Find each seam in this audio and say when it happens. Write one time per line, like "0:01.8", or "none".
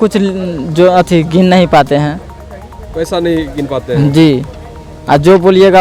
none